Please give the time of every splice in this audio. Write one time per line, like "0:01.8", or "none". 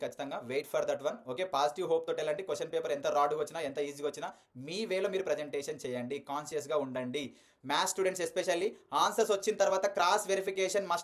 none